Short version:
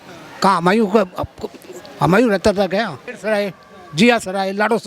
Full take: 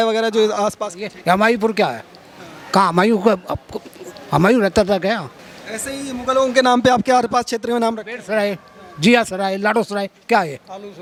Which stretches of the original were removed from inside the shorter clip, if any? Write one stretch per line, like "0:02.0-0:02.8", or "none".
0:05.4-0:08.1